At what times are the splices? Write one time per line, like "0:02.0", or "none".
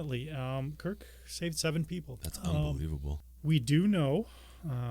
0:02.2
0:03.1